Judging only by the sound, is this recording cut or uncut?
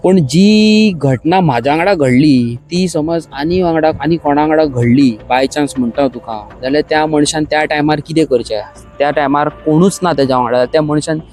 uncut